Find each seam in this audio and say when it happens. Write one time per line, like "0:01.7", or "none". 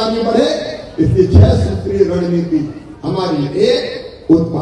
none